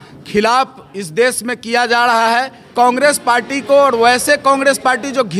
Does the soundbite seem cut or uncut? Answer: cut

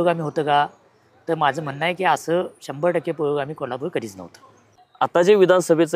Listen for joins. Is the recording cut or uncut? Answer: cut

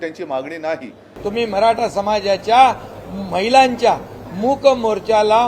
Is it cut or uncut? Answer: cut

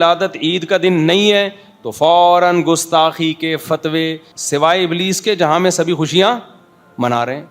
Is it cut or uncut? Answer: cut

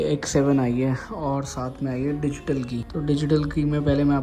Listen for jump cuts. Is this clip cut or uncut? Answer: cut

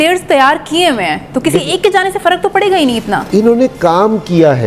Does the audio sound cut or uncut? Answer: uncut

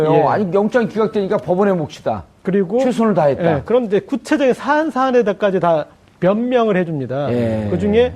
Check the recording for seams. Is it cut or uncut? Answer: cut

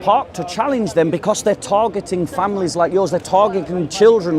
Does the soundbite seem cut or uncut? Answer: uncut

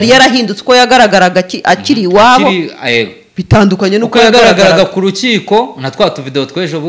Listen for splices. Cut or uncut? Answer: uncut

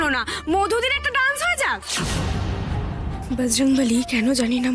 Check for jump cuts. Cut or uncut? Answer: cut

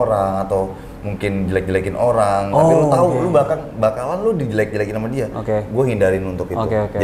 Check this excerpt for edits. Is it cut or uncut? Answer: uncut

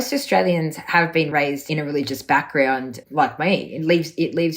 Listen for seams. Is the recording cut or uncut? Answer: cut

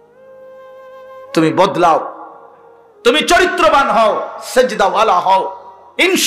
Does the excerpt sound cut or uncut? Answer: cut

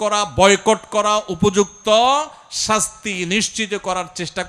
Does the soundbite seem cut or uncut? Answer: uncut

